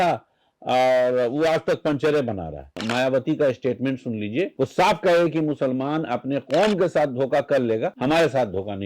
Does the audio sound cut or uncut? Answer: cut